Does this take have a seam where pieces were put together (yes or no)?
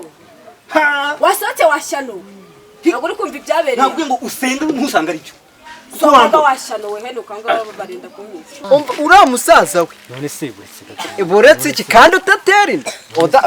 yes